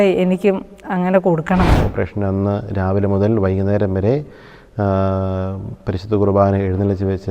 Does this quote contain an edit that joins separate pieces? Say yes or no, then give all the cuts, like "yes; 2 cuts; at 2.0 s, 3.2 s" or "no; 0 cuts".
yes; 1 cut; at 1.8 s